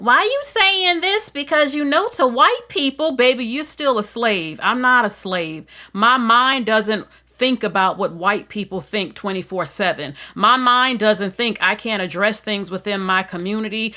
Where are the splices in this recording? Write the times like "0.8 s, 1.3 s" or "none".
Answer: none